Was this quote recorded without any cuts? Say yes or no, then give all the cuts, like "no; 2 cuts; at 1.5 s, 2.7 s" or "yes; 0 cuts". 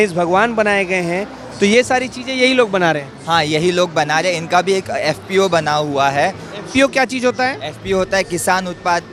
yes; 0 cuts